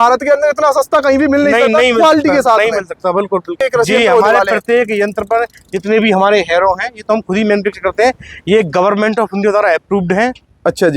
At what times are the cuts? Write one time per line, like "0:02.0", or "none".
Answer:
0:03.5